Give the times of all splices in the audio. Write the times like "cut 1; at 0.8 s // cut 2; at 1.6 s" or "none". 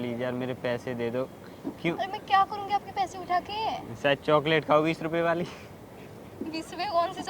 cut 1; at 5.5 s